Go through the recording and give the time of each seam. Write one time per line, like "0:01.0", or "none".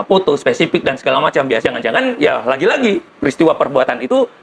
0:01.5